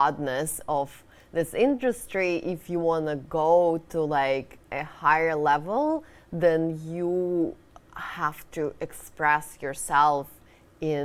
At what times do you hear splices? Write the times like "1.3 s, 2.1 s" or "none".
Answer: none